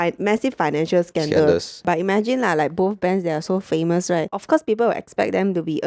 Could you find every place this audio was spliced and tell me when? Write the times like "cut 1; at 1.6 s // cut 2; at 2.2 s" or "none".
cut 1; at 1.8 s // cut 2; at 4.3 s